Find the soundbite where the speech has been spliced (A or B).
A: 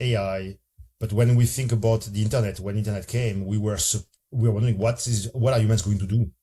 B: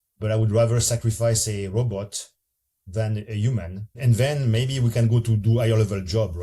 B